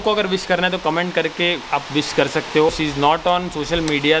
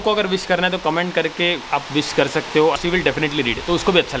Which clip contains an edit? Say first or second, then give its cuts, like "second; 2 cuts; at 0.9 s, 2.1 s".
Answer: second; 1 cut; at 2.8 s